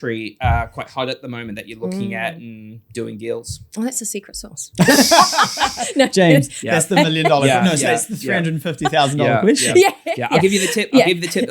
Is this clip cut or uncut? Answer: uncut